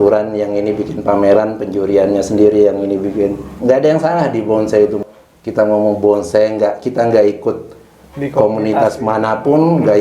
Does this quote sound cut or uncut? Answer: cut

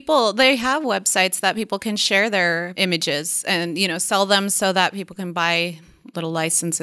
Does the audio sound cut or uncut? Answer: uncut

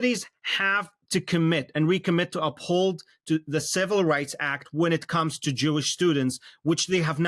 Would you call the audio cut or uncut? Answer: uncut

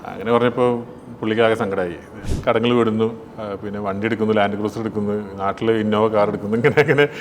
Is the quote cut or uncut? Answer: cut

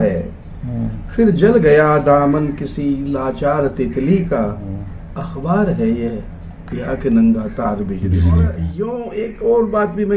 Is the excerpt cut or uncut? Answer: cut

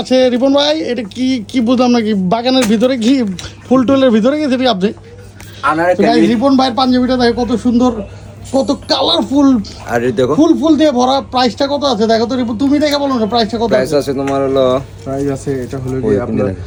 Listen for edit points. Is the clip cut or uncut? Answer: uncut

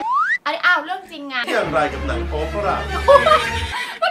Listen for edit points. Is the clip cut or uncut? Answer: cut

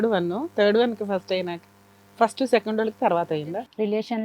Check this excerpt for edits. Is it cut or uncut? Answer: cut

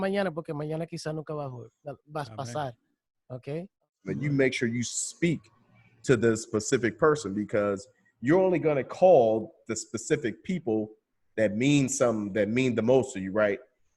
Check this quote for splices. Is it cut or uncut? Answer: cut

